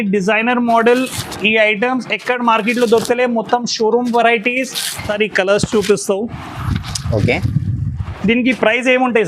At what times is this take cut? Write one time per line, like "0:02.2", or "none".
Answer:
0:05.1